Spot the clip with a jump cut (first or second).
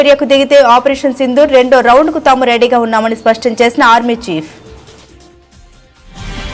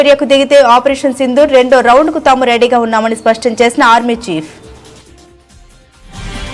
first